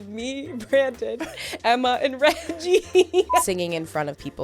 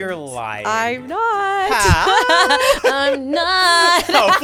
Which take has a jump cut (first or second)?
first